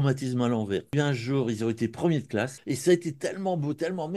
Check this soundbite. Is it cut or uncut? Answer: cut